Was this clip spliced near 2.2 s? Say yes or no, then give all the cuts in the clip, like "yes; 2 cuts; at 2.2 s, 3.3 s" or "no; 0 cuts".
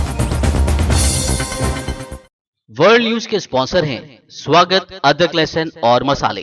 yes; 1 cut; at 2.2 s